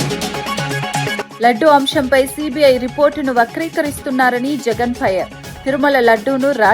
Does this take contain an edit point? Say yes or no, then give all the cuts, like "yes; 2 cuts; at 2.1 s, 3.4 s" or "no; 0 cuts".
yes; 1 cut; at 1.3 s